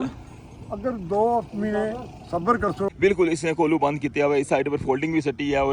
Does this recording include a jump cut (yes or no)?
yes